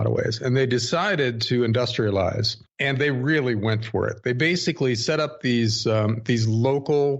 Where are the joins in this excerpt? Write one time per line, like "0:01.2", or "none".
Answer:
0:04.8